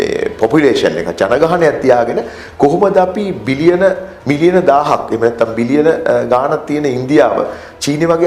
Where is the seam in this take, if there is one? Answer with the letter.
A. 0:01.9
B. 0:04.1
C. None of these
C